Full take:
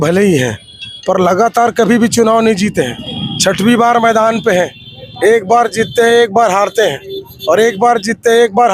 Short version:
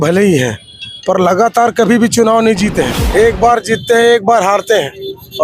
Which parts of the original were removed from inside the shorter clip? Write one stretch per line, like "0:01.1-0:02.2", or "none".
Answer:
0:02.9-0:05.0